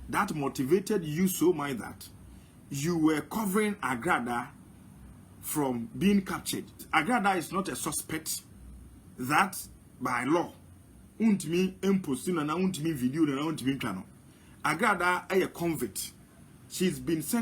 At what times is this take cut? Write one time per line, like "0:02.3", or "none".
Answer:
0:06.9